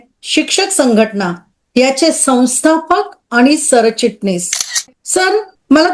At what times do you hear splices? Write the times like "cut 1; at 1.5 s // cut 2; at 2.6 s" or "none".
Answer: cut 1; at 5.0 s